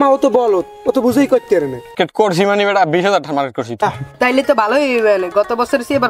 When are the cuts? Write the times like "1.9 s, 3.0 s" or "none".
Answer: 1.9 s, 3.8 s